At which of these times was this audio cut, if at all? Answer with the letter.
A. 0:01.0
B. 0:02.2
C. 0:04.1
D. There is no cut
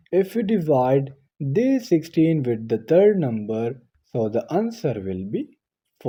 D